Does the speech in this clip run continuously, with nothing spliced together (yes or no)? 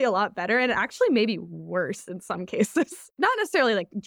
no